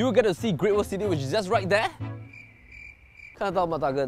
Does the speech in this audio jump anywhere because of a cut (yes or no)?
no